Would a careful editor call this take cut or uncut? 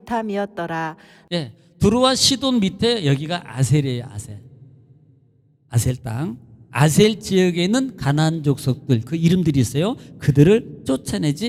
uncut